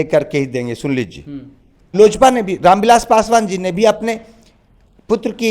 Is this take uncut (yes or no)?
no